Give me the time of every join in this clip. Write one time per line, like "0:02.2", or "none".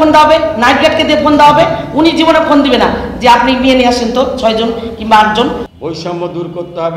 0:05.7